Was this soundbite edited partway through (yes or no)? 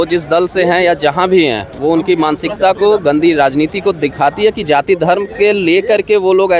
no